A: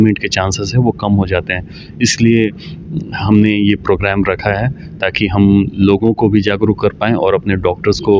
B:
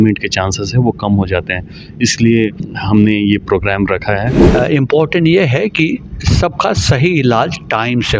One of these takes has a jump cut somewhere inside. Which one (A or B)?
B